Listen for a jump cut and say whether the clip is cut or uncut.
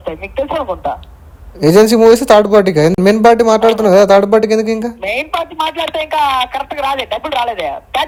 uncut